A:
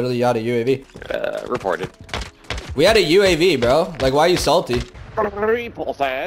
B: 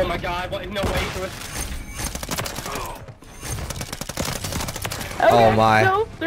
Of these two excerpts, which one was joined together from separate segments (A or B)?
A